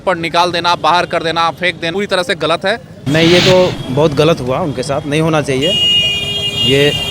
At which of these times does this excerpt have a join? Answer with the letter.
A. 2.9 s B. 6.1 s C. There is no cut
A